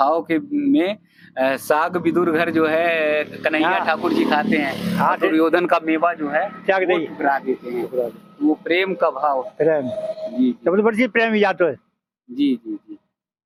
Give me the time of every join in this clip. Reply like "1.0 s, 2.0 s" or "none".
none